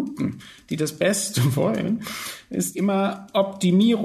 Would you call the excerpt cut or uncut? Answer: cut